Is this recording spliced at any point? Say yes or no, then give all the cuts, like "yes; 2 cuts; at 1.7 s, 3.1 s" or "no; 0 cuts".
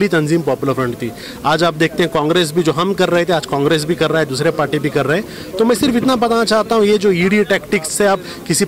no; 0 cuts